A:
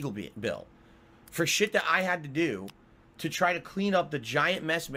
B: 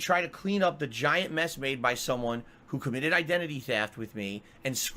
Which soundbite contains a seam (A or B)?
B